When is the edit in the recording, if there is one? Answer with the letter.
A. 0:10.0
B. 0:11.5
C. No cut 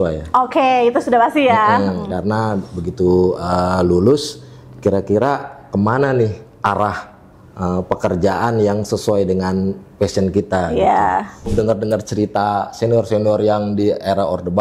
B